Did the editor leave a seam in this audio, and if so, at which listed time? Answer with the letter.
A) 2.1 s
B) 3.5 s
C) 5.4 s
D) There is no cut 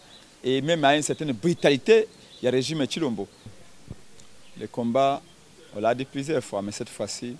B